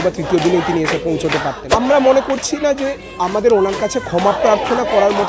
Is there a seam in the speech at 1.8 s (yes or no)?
yes